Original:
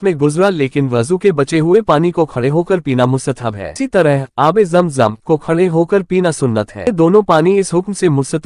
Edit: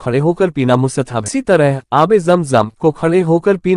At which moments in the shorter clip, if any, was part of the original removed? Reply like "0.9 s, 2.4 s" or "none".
1.2 s